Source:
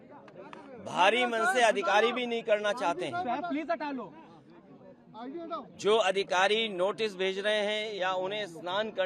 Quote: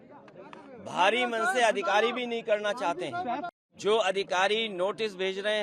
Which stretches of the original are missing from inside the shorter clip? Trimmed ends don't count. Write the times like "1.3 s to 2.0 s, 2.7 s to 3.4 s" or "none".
3.5 s to 5.5 s